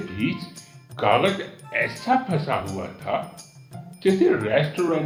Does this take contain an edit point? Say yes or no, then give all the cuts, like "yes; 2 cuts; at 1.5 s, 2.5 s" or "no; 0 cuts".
no; 0 cuts